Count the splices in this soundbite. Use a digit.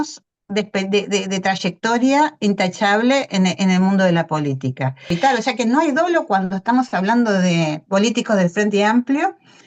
1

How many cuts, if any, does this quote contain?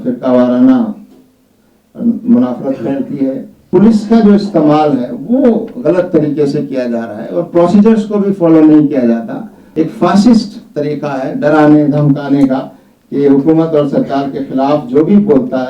2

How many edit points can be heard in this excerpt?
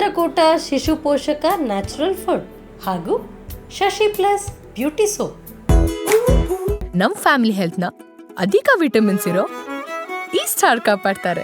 1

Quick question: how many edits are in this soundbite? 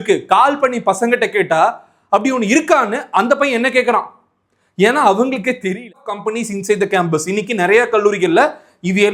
1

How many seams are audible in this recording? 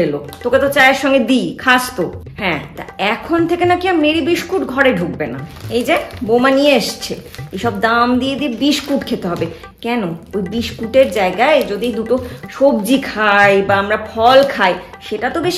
1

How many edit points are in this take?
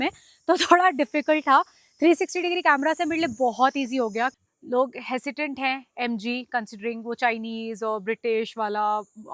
1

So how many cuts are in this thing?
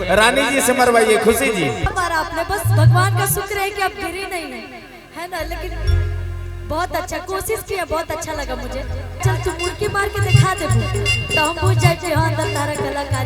2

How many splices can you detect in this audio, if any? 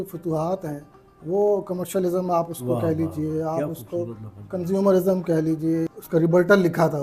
1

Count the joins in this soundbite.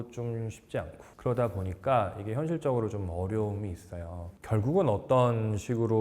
1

